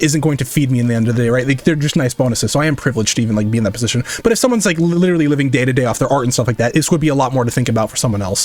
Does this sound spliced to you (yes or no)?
no